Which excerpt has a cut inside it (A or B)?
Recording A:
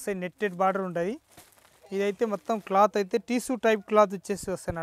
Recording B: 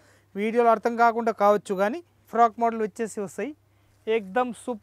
B